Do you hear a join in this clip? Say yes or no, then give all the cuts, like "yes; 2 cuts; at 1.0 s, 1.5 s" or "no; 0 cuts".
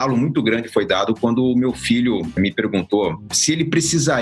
yes; 2 cuts; at 2.3 s, 3.2 s